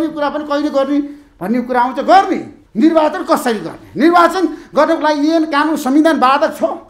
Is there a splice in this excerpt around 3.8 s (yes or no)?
no